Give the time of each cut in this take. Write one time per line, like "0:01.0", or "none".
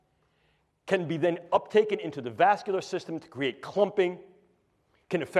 none